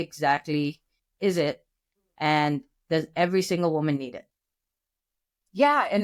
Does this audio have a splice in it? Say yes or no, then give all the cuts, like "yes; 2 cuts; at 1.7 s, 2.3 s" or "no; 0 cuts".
no; 0 cuts